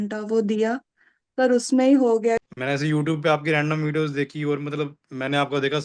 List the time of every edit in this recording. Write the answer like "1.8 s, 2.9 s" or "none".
2.4 s